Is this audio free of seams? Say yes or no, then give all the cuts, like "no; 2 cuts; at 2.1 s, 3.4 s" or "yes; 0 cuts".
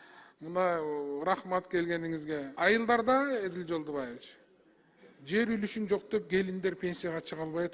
no; 1 cut; at 2.5 s